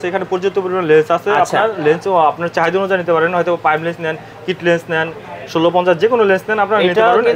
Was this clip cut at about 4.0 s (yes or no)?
no